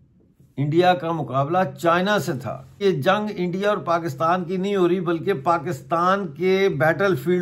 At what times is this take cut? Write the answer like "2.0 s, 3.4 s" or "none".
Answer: 2.8 s